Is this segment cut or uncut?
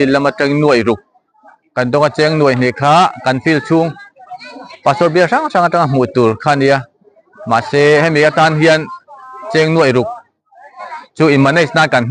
uncut